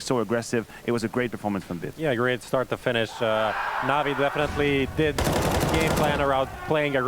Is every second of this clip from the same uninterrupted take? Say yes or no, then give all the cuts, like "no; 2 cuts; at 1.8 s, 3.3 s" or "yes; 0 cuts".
yes; 0 cuts